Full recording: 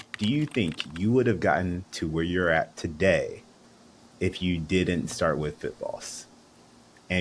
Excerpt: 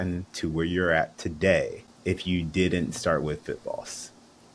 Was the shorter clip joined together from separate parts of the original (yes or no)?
yes